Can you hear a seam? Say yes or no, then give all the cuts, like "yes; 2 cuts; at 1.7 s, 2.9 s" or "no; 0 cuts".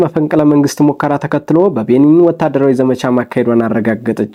no; 0 cuts